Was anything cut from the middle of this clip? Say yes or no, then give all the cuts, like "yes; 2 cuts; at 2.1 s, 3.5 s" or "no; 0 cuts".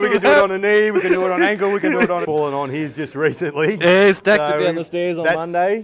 yes; 1 cut; at 2.2 s